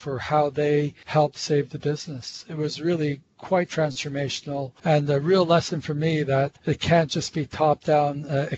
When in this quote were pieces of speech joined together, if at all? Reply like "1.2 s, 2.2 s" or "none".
1.0 s, 4.7 s, 6.6 s